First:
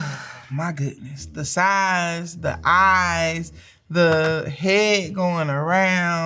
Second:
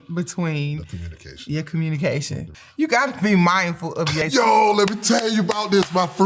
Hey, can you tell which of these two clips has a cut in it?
second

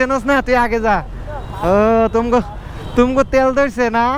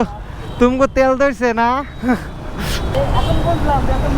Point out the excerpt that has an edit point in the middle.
second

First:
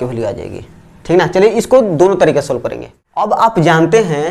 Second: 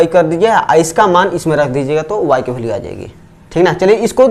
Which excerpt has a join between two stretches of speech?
first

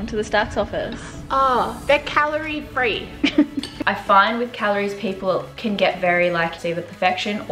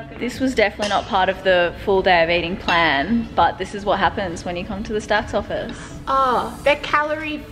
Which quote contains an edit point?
first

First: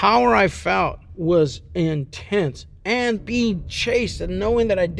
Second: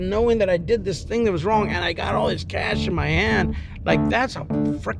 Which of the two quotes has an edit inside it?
first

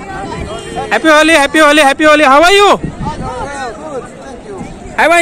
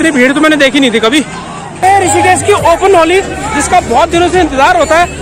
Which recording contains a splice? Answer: second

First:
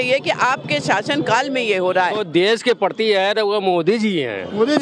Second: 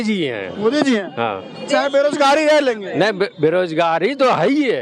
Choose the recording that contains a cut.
first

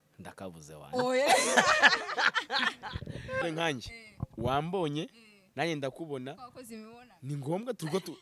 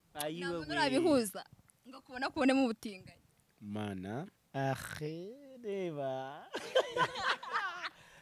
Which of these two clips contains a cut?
first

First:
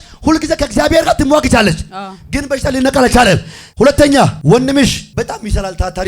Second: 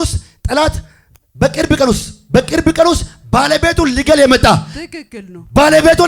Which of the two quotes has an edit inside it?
first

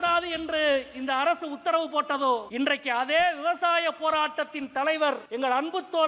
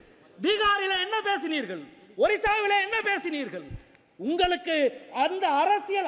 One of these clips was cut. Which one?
first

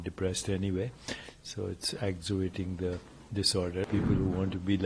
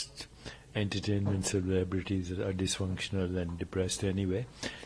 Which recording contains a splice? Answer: first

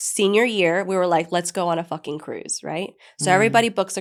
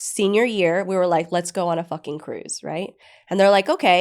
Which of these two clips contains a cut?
second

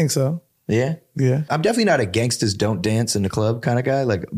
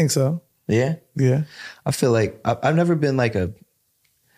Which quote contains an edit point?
first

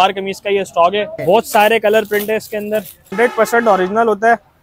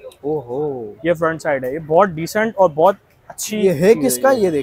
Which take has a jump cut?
first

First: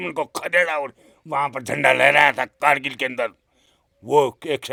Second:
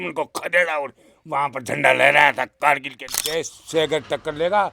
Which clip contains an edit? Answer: second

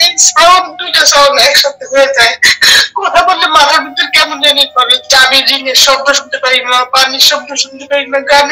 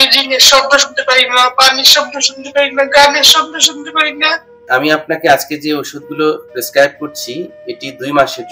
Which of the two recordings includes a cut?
second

